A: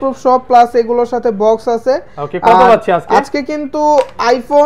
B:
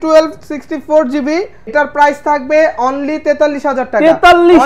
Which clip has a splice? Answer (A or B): B